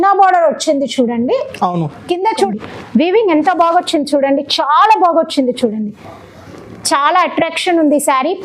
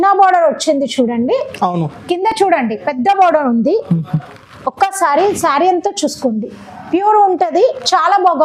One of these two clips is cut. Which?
first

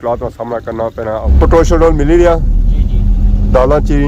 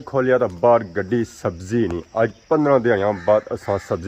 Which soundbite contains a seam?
first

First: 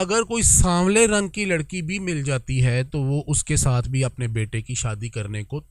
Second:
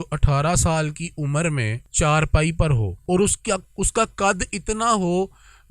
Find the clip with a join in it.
second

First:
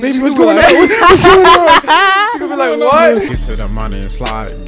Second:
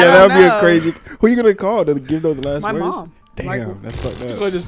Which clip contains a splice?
first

